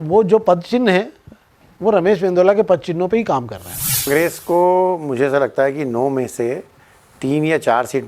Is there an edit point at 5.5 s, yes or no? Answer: no